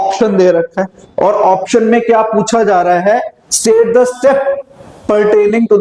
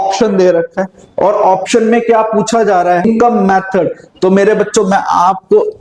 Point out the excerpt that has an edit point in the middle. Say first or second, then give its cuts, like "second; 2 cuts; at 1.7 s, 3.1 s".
second; 1 cut; at 3.0 s